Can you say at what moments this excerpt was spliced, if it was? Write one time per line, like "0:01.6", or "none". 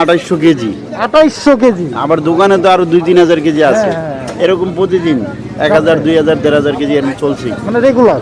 none